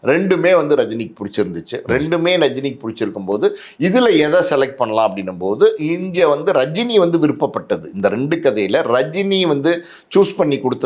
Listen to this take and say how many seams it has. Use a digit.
0